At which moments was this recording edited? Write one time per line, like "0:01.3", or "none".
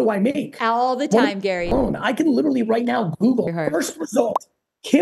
0:01.7
0:03.5